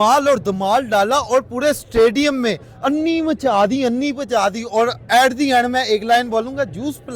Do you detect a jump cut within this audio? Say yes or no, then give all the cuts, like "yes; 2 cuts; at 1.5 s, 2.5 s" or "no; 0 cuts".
no; 0 cuts